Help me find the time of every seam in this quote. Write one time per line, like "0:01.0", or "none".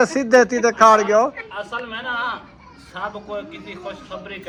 none